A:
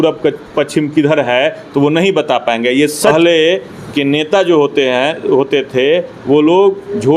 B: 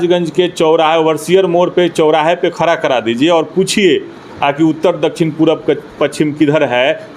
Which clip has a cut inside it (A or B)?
A